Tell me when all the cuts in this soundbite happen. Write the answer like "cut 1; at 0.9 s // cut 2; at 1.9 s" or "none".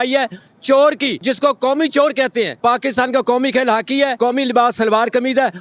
cut 1; at 1.1 s // cut 2; at 2.5 s // cut 3; at 4.1 s